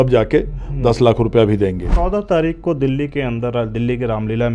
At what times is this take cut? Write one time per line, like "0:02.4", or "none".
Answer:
0:01.9